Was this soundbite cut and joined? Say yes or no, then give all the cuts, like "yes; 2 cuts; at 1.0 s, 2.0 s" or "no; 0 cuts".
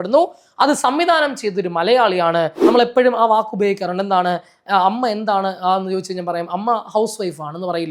yes; 1 cut; at 2.6 s